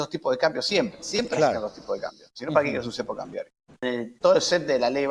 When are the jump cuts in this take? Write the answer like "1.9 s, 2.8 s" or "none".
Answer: 3.8 s